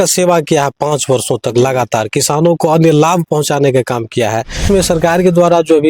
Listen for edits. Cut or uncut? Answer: cut